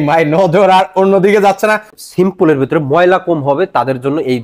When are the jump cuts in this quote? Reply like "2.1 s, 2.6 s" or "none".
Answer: 2.0 s